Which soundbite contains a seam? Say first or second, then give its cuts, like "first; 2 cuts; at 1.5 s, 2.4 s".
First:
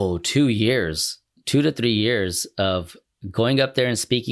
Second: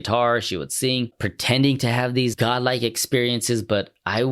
second; 2 cuts; at 1.3 s, 2.3 s